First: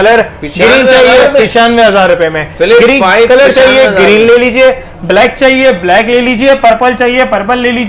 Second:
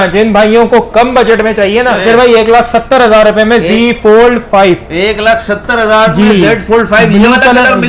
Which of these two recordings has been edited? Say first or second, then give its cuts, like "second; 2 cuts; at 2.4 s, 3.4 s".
second; 1 cut; at 2.0 s